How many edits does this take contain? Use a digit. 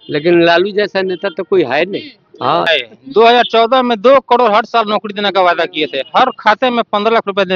1